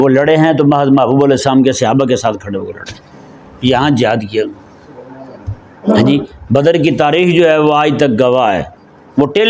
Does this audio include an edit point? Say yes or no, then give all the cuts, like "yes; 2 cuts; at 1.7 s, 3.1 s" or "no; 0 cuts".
no; 0 cuts